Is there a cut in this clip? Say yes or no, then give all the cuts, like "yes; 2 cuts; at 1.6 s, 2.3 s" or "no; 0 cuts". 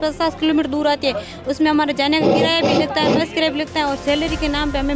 no; 0 cuts